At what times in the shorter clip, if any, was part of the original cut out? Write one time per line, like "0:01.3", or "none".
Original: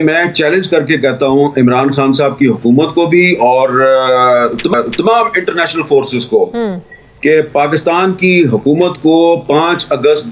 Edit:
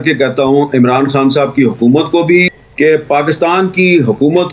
0:02.5